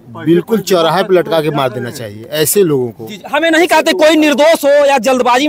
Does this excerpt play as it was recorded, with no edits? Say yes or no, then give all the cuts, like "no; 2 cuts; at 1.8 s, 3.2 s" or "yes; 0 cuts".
yes; 0 cuts